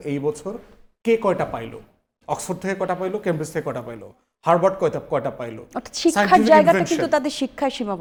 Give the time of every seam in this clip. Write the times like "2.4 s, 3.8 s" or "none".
none